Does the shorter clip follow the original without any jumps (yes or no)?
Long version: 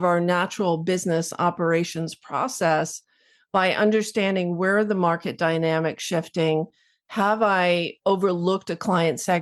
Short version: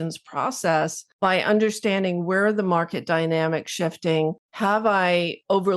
no